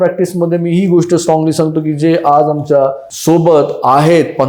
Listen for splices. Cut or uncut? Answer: cut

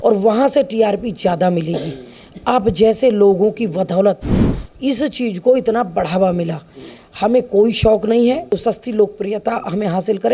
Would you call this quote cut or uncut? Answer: cut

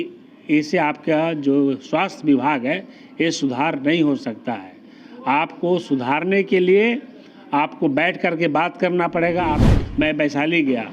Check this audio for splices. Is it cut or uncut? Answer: cut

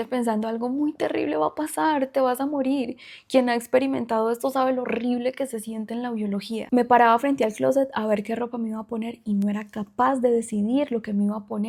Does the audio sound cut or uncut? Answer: uncut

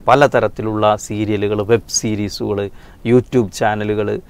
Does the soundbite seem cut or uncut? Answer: uncut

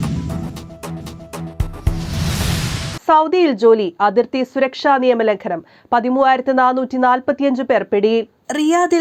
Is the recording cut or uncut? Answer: uncut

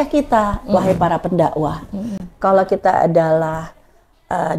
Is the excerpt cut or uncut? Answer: uncut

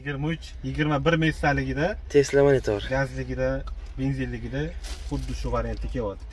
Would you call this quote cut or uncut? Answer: uncut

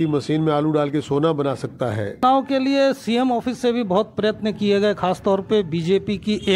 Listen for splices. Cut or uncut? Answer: cut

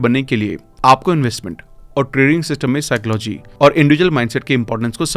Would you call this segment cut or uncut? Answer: uncut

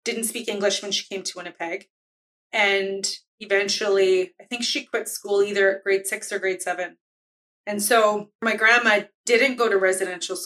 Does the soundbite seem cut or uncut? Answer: cut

